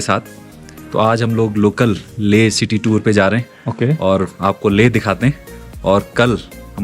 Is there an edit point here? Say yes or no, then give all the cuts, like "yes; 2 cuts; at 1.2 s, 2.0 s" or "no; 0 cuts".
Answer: no; 0 cuts